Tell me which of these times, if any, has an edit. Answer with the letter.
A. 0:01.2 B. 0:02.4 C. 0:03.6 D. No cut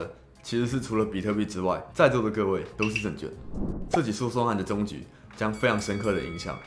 C